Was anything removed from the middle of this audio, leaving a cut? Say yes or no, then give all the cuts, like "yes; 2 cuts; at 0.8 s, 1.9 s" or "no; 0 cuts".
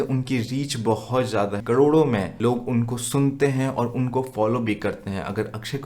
yes; 2 cuts; at 1.6 s, 2.3 s